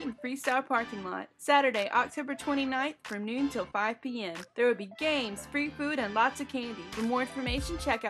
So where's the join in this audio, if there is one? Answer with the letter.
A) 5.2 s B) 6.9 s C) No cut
B